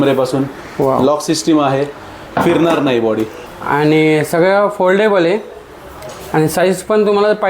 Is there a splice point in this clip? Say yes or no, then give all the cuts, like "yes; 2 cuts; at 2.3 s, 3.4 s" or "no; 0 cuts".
yes; 1 cut; at 3.3 s